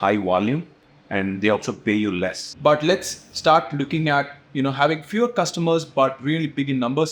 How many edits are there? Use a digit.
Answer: 1